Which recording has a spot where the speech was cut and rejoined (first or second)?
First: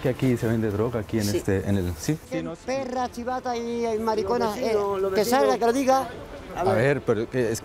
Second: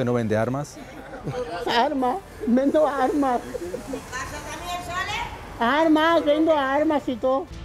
first